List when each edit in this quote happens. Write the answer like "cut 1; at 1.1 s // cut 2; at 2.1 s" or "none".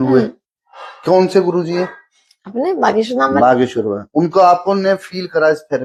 none